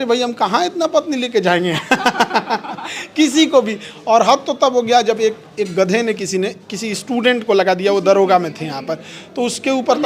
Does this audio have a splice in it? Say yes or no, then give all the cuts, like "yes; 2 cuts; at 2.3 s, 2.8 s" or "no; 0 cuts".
no; 0 cuts